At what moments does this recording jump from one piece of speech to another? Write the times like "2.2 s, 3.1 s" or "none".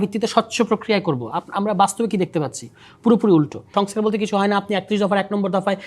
3.7 s